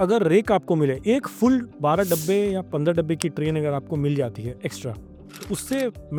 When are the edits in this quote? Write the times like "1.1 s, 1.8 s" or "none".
none